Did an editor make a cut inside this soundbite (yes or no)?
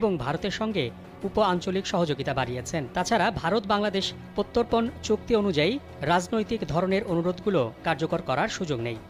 yes